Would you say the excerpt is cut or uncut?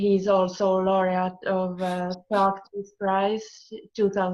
uncut